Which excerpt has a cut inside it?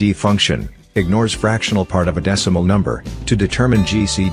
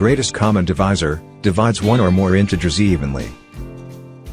second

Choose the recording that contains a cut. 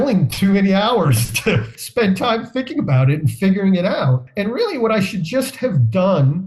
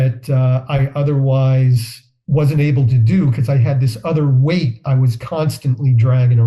first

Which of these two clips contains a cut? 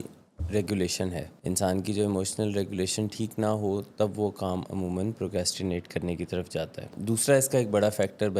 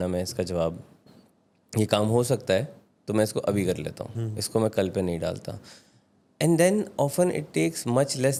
first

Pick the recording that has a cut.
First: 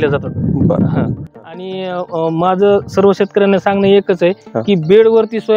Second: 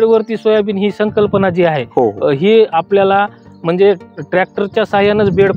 first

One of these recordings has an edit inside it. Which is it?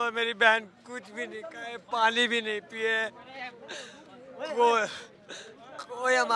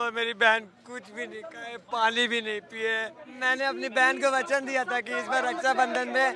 second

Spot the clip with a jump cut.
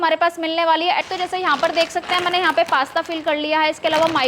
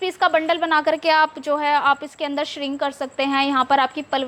first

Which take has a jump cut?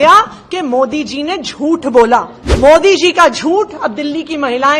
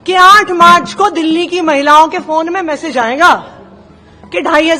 first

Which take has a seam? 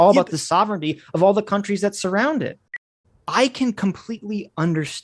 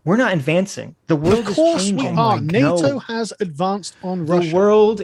first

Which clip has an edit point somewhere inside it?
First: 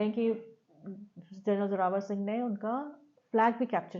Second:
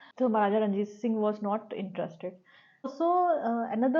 second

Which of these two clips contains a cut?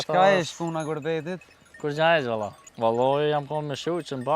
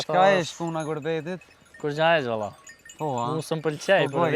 first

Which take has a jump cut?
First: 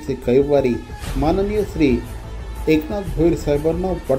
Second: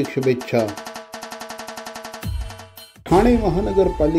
second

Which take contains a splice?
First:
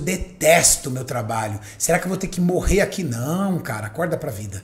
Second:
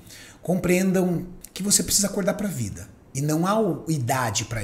second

